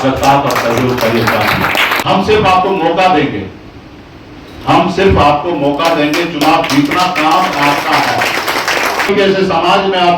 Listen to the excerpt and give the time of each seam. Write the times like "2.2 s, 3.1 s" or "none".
1.9 s, 9.1 s